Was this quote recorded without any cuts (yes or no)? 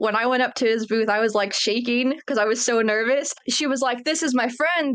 no